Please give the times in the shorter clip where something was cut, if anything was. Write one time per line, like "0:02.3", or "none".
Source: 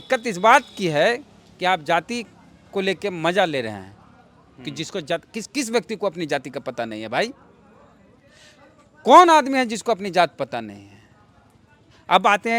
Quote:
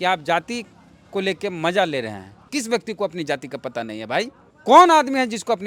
0:02.3
0:04.5